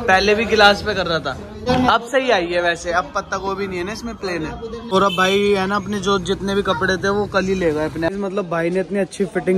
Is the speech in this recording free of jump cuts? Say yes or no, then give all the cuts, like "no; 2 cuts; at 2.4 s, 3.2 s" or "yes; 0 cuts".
no; 3 cuts; at 1.4 s, 4.8 s, 8.1 s